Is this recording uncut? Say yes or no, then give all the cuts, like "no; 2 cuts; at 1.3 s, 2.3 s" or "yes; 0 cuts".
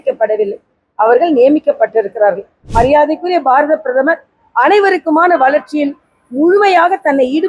no; 1 cut; at 2.6 s